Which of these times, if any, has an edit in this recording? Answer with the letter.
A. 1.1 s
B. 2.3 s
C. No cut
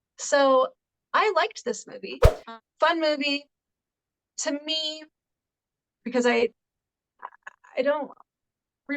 B